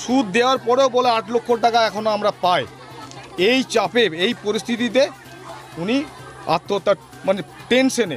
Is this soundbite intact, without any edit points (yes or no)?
yes